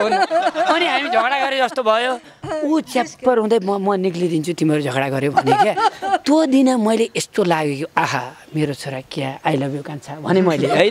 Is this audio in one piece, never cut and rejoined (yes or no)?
yes